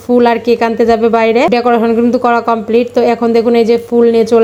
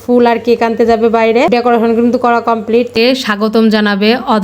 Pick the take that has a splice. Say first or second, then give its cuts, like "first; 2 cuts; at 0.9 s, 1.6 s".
second; 1 cut; at 2.9 s